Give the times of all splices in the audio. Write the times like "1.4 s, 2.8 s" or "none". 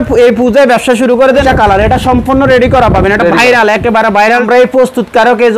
1.4 s, 4.4 s

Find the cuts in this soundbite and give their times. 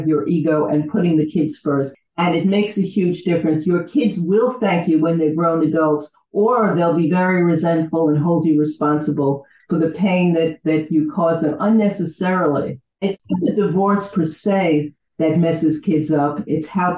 1.9 s, 13.2 s

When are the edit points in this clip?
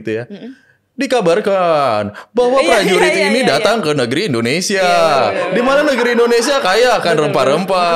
none

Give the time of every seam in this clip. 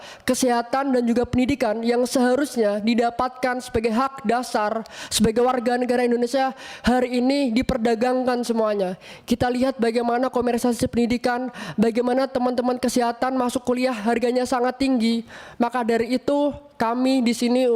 none

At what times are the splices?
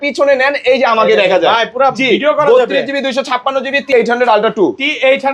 3.9 s

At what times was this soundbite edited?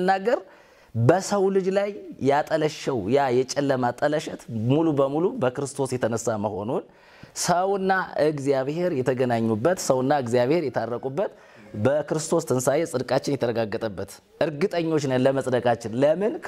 none

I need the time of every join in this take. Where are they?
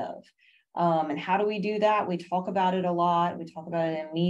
none

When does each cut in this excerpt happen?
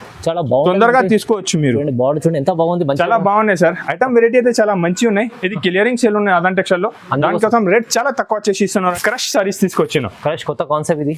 8.9 s

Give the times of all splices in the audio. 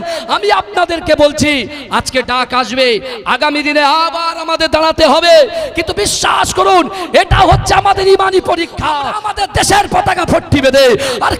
9.1 s

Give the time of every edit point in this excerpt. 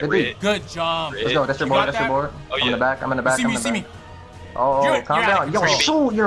none

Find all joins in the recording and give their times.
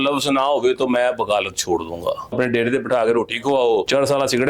2.3 s

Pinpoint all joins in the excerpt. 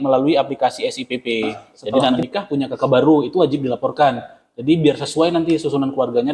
2.2 s

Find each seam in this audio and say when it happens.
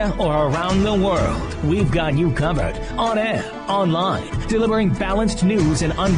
none

